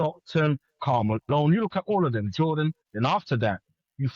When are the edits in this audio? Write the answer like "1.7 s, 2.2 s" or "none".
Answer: 2.8 s